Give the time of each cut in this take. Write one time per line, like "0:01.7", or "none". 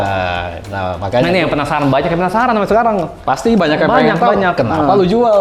none